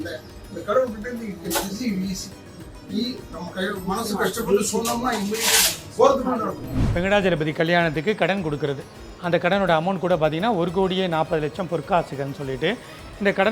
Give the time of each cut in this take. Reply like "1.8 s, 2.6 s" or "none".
6.9 s

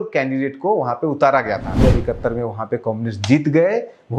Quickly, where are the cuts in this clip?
1.8 s

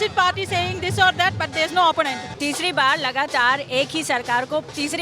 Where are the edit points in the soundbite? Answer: 2.3 s

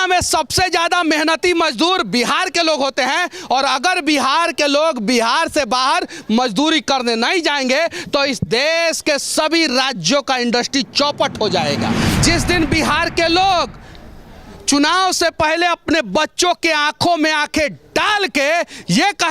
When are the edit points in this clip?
12.1 s

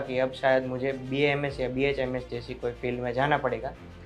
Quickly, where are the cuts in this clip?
none

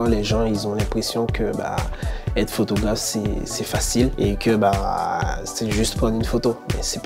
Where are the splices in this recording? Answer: none

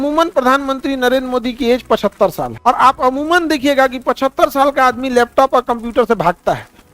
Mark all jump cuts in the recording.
2.5 s

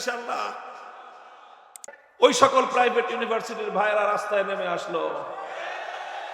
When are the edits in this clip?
1.9 s

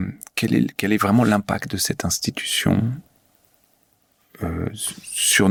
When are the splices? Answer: none

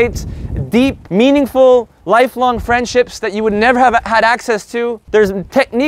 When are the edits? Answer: 1.0 s, 1.9 s, 5.0 s

